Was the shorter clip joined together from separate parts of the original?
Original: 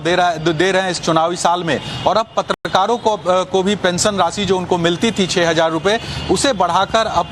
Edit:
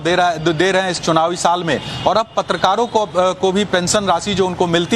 yes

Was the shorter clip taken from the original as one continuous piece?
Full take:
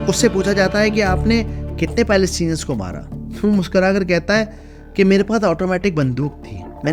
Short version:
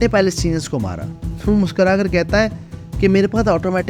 yes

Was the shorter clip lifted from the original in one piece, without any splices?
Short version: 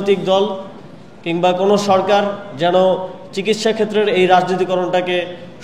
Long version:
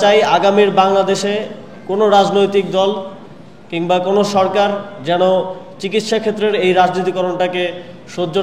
yes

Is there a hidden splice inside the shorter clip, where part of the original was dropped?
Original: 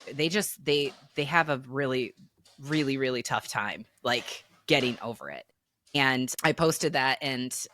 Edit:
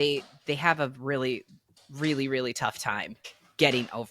yes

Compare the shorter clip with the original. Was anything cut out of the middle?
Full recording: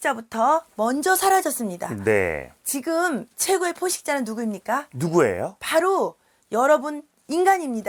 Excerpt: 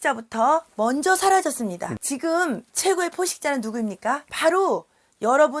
yes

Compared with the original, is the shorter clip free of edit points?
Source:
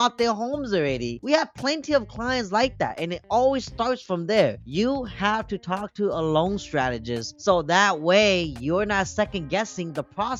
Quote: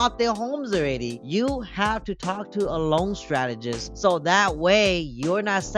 no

